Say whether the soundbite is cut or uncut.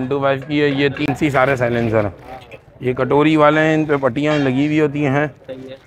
cut